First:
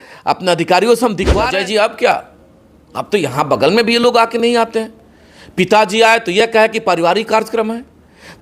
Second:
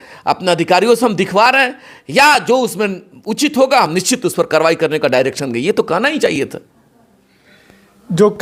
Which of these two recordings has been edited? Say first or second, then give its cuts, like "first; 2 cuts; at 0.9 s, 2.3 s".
first; 1 cut; at 1.4 s